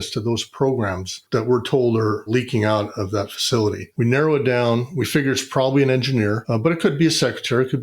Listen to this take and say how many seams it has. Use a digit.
1